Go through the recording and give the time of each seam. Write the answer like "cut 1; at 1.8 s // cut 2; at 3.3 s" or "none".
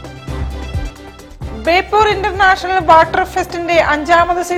none